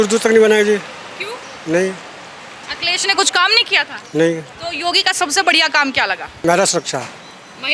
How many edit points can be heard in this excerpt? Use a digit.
2